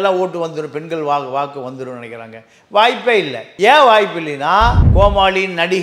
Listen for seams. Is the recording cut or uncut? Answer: cut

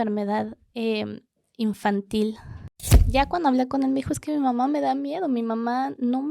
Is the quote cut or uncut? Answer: cut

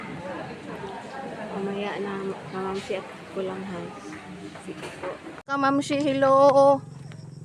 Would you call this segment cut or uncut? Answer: cut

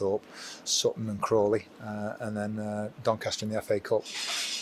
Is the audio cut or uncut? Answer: uncut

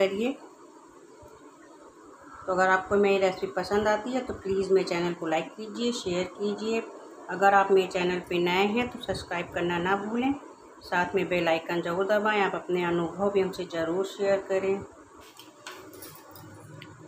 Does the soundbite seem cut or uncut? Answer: cut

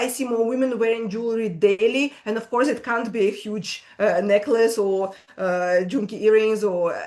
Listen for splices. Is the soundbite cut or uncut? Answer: uncut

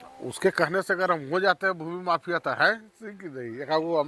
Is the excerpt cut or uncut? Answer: uncut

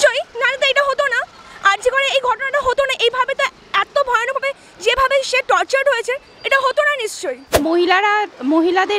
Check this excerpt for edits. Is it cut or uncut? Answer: cut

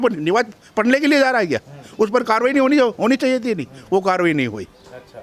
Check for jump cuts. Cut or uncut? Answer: uncut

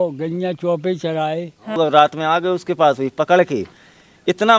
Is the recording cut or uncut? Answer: cut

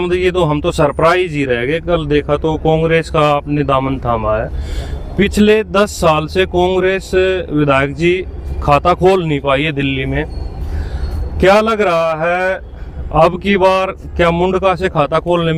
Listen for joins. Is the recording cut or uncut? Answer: uncut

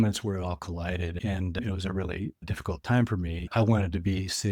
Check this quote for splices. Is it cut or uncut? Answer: cut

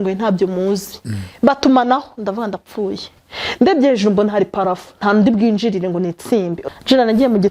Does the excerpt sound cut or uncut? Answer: cut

